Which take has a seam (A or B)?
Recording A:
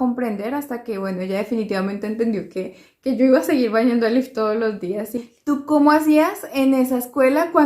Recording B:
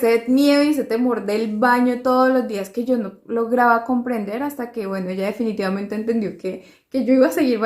A